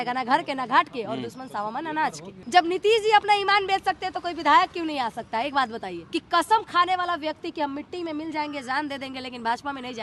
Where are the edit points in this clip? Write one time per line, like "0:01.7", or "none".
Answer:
0:02.4
0:06.0